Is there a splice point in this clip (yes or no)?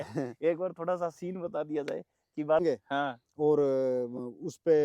yes